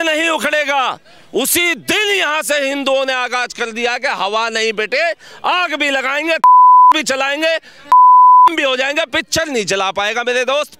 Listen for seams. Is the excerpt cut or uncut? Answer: uncut